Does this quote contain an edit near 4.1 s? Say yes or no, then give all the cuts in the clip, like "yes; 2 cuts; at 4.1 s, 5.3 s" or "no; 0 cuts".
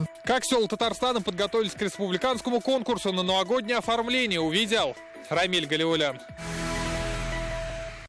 no; 1 cut; at 6.3 s